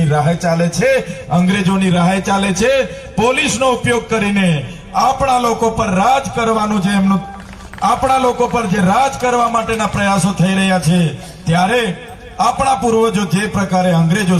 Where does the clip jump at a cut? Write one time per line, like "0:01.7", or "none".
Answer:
none